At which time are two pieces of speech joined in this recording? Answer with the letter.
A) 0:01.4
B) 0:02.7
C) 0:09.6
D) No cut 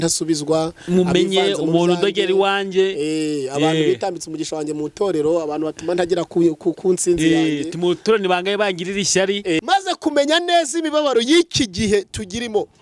C